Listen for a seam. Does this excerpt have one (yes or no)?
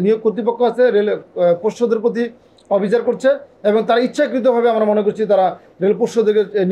no